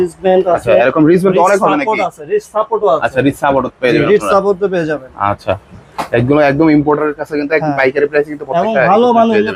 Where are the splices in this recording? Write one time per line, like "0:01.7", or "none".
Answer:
none